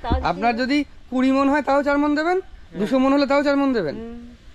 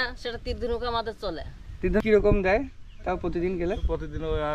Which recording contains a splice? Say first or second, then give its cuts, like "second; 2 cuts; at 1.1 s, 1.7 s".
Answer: second; 1 cut; at 2.0 s